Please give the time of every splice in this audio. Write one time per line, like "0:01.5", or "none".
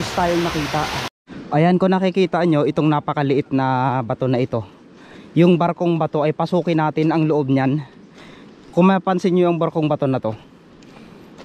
0:01.1